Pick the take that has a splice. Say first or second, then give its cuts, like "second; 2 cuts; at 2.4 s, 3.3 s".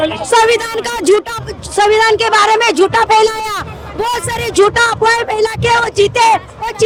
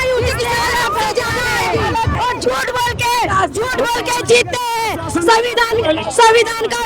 second; 1 cut; at 2.2 s